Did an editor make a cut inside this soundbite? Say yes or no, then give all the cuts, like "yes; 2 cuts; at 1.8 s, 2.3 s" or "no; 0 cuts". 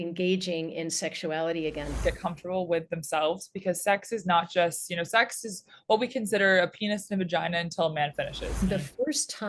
yes; 2 cuts; at 2.0 s, 8.5 s